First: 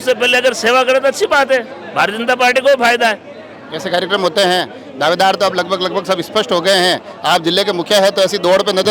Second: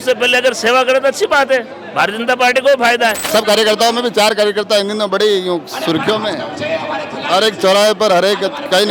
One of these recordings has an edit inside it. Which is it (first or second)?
second